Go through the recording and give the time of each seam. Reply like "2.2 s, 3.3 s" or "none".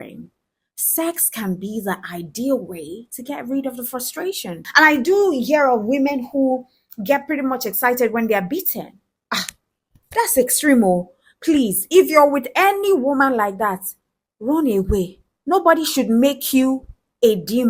4.8 s